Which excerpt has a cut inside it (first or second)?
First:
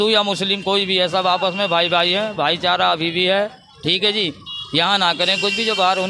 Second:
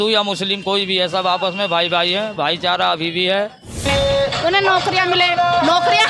second